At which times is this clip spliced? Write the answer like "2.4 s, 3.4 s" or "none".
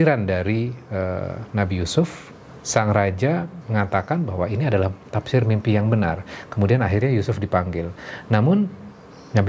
none